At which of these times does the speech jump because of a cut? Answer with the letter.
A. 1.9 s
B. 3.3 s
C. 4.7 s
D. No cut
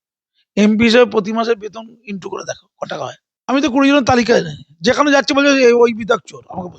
B